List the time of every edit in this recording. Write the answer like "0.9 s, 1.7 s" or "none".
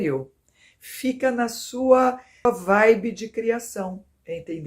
2.4 s